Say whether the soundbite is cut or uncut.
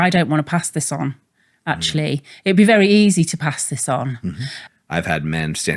cut